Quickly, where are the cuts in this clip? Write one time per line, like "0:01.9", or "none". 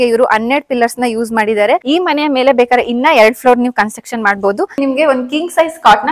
0:01.8
0:04.8

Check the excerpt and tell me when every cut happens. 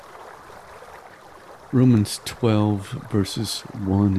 0:01.7

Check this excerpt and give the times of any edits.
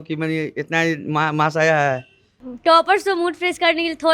0:02.4

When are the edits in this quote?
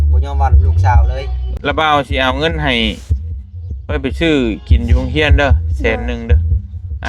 0:01.5

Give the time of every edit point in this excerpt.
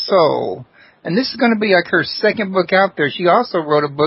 0:01.3

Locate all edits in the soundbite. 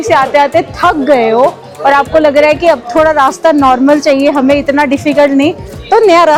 none

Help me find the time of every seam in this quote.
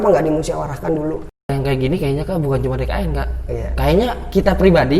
0:01.4

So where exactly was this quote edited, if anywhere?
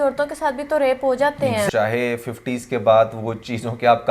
0:01.7

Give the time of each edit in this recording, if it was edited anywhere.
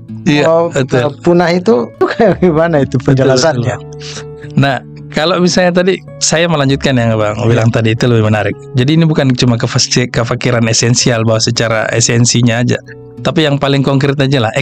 0:02.0

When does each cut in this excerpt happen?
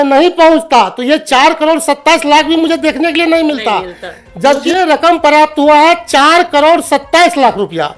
0:04.6

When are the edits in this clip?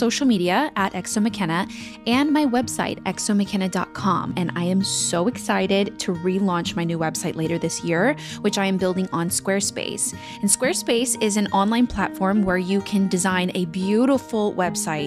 none

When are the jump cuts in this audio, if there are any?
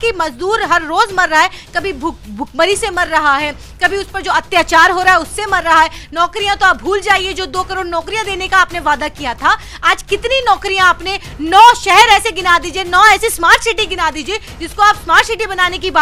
none

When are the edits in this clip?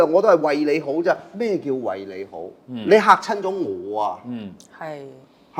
none

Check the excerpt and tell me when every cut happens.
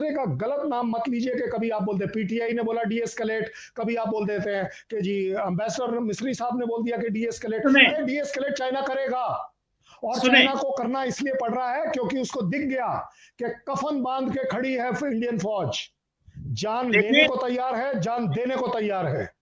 none

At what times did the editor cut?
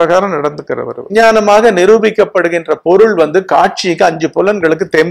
0:01.0

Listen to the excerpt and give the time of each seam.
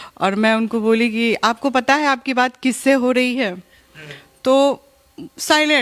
none

